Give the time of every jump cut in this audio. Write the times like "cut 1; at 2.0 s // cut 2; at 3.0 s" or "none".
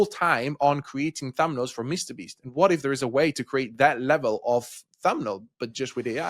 none